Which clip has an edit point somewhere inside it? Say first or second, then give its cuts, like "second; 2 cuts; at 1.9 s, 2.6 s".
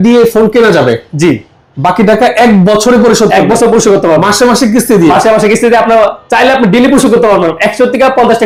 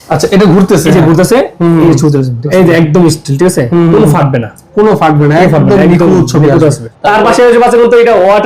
second; 2 cuts; at 2.4 s, 6.9 s